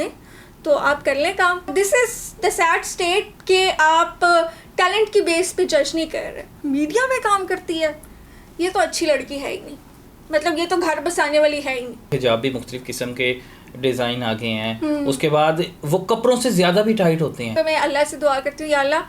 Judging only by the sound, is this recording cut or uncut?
cut